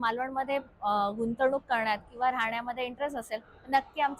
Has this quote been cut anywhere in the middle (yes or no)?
no